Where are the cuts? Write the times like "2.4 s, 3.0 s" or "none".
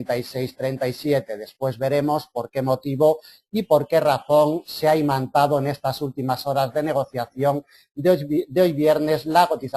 none